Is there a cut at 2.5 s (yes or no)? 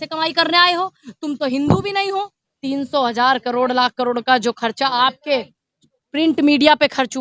yes